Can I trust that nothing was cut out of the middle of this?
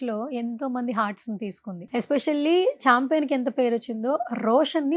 no; 1 cut; at 1.8 s

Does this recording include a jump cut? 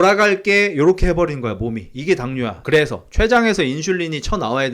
yes; 1 cut; at 2.6 s

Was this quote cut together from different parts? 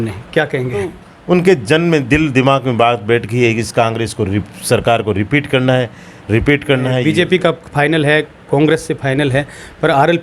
yes; 2 cuts; at 1.1 s, 7.0 s

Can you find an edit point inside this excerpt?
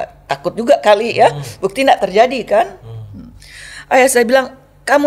no; 0 cuts

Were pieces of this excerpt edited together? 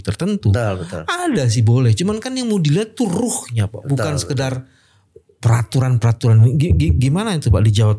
no; 0 cuts

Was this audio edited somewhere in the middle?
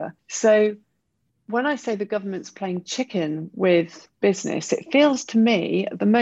no; 0 cuts

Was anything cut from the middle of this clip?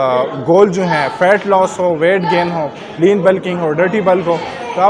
no; 0 cuts

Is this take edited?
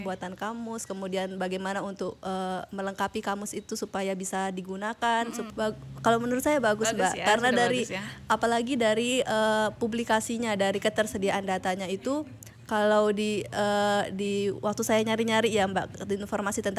yes; 1 cut; at 5.4 s

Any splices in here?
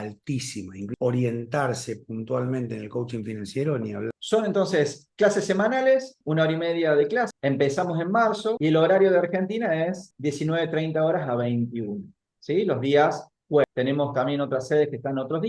yes; 5 cuts; at 0.9 s, 4.2 s, 7.3 s, 8.6 s, 13.7 s

